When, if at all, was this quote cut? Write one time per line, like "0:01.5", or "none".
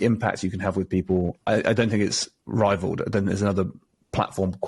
0:01.4